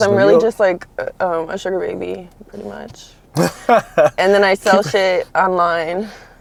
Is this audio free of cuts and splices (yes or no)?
yes